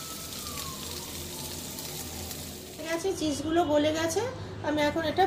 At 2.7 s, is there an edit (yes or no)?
yes